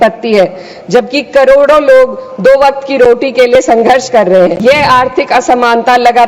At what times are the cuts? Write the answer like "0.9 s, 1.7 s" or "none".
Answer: 4.6 s